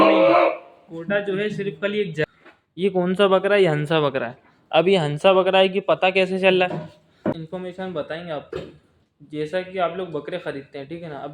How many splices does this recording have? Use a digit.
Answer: 2